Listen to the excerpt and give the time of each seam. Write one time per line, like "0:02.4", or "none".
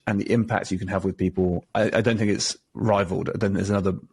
0:01.6